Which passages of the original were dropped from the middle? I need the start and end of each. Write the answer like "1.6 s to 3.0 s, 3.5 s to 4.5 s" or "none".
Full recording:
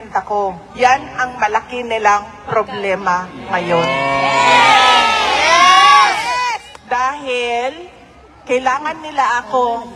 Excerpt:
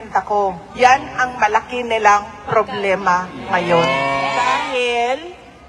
4.4 s to 6.9 s